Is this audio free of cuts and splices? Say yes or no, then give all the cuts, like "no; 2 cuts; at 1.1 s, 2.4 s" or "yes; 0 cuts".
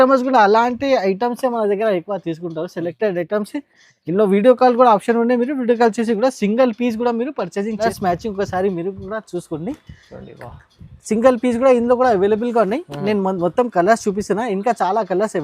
no; 1 cut; at 7.8 s